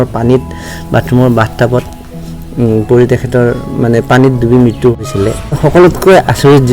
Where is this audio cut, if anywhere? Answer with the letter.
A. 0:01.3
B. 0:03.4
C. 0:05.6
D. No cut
C